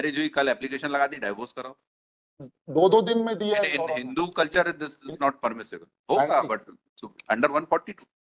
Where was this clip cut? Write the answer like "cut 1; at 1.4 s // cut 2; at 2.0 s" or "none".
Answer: none